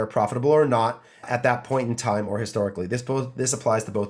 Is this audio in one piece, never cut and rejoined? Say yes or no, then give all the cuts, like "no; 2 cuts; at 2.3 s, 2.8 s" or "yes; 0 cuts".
no; 1 cut; at 1.2 s